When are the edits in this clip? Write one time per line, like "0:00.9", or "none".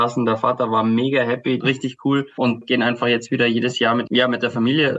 0:01.6
0:02.6
0:04.0